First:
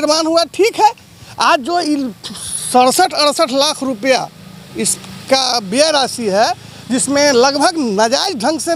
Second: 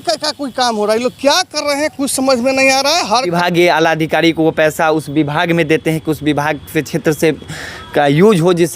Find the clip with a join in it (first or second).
second